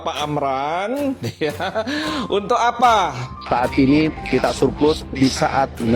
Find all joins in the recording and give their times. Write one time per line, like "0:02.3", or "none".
0:03.4